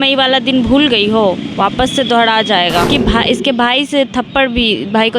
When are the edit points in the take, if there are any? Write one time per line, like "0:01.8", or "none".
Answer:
0:02.9